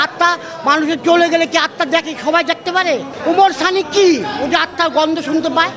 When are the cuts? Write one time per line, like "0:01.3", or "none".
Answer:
0:03.1